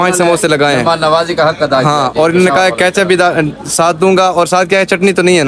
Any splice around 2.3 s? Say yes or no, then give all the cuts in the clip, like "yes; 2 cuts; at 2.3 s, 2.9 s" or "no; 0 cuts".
no; 0 cuts